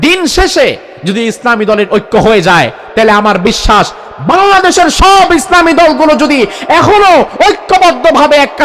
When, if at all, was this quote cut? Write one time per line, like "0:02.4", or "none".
none